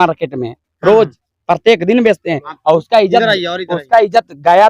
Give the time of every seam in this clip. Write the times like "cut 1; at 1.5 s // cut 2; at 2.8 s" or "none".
none